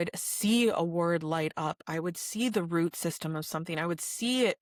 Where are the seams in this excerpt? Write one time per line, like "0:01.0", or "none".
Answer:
none